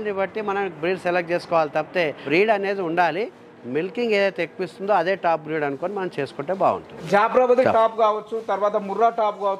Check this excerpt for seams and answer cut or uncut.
cut